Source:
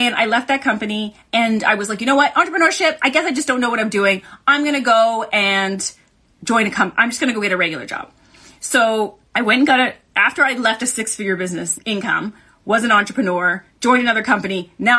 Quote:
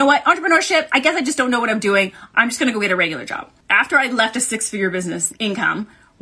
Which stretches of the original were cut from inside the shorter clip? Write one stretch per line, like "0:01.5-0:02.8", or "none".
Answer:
0:04.4-0:06.9
0:08.2-0:10.1

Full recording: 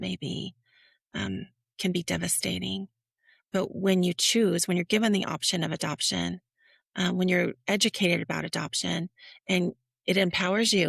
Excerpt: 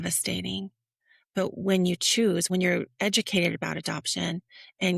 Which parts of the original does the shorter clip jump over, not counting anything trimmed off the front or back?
0:04.6-0:07.1

